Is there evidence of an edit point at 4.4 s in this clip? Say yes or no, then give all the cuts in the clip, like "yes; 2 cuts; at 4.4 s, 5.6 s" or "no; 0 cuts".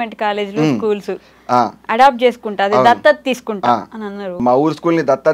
yes; 1 cut; at 4.4 s